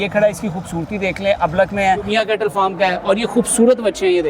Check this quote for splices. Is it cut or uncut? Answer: cut